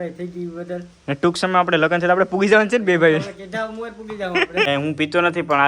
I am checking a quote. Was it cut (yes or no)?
yes